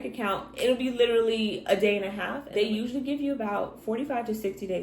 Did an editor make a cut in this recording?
yes; 1 cut; at 2.4 s

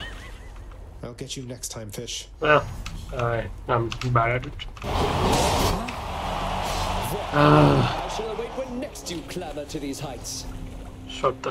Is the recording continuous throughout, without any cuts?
no; 2 cuts; at 2.2 s, 4.8 s

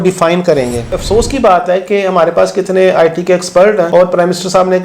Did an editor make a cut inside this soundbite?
yes; 2 cuts; at 0.9 s, 3.9 s

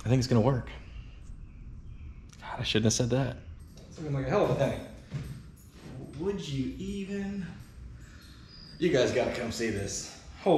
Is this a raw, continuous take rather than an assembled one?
no; 1 cut; at 3.6 s

